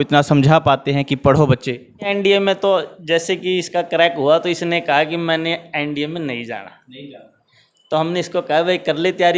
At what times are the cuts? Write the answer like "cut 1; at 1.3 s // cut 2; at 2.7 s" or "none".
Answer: cut 1; at 2.1 s